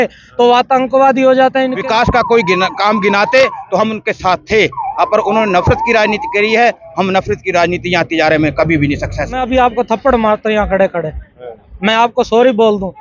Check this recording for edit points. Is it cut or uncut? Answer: cut